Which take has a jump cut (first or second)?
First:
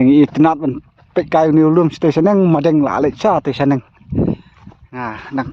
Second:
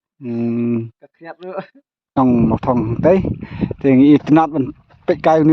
second